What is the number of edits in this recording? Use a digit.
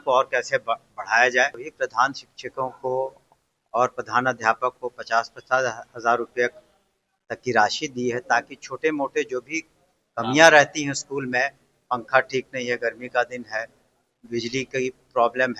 1